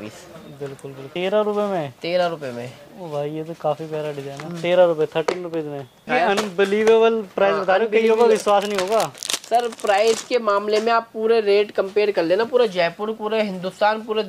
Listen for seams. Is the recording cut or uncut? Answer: cut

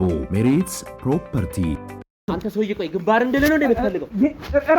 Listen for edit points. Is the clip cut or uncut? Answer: cut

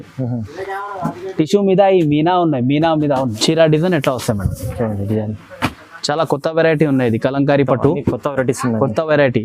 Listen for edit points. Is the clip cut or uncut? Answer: cut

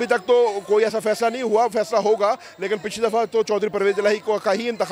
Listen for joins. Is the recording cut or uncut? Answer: uncut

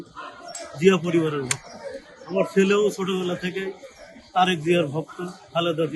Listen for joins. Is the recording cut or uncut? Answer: uncut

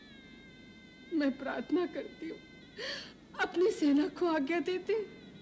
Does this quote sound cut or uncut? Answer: uncut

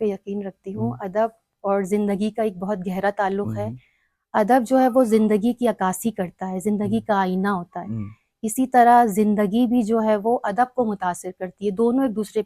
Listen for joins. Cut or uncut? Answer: uncut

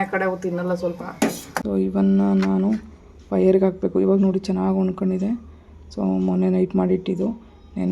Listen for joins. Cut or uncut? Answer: cut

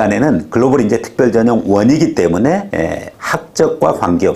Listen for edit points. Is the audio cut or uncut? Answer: uncut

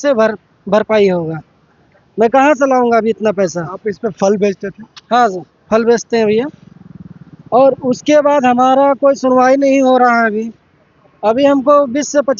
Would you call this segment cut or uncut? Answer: uncut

